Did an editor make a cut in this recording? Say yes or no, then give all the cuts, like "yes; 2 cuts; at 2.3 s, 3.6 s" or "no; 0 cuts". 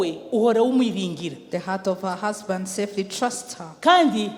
no; 0 cuts